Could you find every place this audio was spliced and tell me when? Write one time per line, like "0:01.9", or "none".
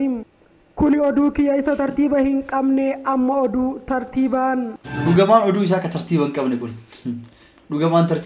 0:04.9